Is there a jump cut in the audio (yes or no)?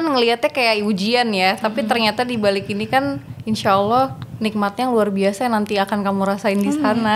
no